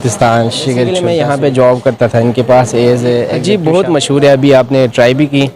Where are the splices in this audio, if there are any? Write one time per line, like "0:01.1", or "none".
0:01.0
0:03.4

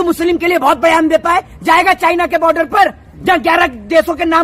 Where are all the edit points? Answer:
none

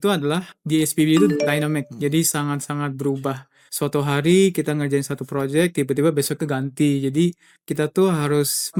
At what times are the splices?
none

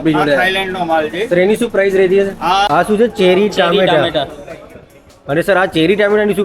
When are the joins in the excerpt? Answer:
0:02.7

